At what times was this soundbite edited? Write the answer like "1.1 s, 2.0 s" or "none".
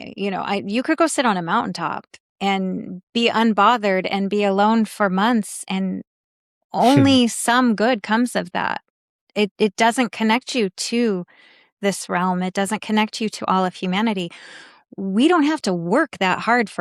none